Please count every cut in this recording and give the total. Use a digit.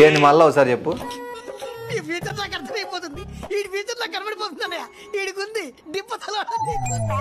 0